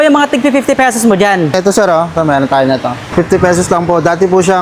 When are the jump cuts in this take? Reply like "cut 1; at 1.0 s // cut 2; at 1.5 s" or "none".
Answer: cut 1; at 1.6 s // cut 2; at 3.1 s